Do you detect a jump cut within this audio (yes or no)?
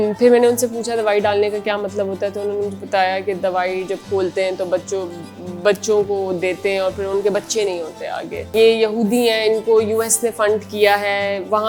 yes